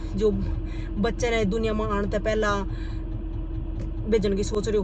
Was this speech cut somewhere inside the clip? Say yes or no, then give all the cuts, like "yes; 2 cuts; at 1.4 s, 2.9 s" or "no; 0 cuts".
no; 0 cuts